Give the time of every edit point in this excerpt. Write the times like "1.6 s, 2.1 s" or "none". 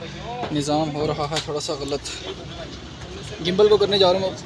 none